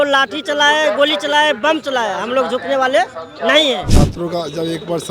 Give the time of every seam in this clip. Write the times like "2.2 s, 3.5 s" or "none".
3.9 s